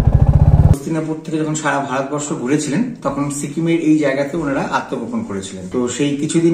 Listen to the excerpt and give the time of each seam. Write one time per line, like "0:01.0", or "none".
0:00.7
0:05.6